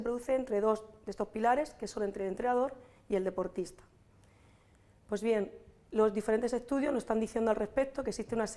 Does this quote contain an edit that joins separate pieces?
yes; 1 cut; at 6.5 s

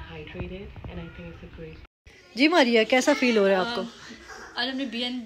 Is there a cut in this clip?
yes; 1 cut; at 1.9 s

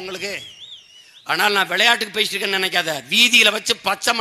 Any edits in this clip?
no; 0 cuts

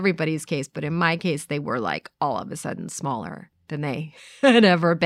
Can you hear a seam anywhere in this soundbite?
no; 0 cuts

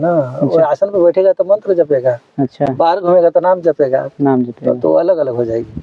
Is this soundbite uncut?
yes; 0 cuts

